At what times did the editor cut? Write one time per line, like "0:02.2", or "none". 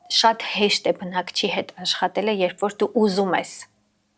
none